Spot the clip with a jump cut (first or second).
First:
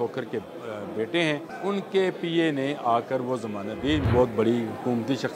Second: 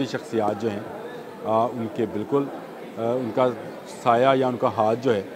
first